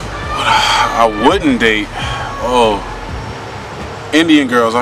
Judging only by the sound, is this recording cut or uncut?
uncut